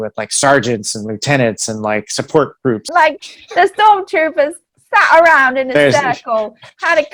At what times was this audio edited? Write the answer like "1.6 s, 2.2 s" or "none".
2.9 s